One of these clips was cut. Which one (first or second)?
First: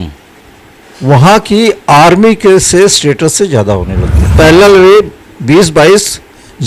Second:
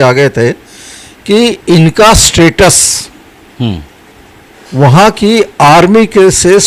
first